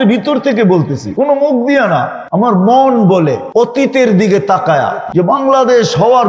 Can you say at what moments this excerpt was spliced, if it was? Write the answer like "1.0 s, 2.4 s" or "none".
1.0 s, 2.2 s, 3.4 s, 5.0 s